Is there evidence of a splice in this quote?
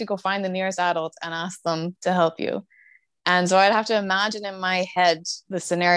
no; 0 cuts

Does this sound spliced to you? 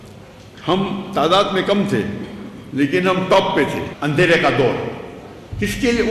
yes; 1 cut; at 3.9 s

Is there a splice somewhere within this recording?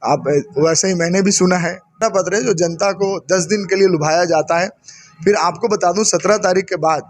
yes; 1 cut; at 2.0 s

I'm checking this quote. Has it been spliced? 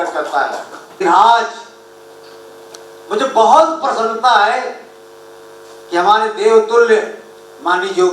yes; 1 cut; at 1.0 s

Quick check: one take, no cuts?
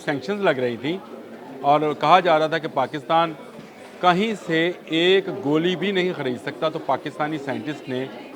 yes; 0 cuts

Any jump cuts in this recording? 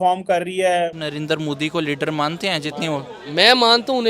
yes; 1 cut; at 1.1 s

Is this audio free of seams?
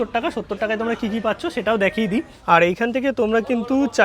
no; 1 cut; at 2.3 s

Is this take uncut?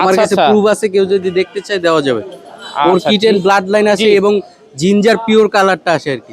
yes; 0 cuts

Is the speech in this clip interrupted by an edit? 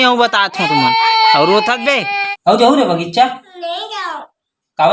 yes; 1 cut; at 2.0 s

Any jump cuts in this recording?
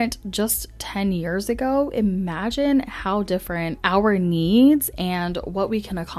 yes; 1 cut; at 3.8 s

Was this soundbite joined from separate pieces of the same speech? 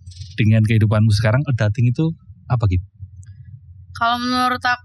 no; 0 cuts

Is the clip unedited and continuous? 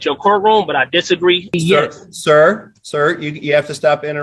no; 1 cut; at 1.6 s

